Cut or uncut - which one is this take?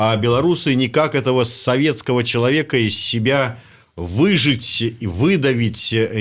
uncut